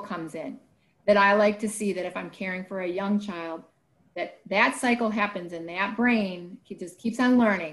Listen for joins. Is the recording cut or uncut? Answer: uncut